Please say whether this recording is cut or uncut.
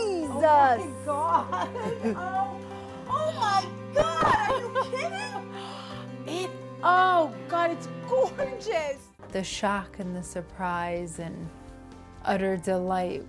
cut